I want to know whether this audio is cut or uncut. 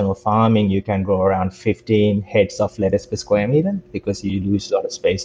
uncut